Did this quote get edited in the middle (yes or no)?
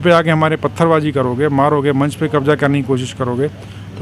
no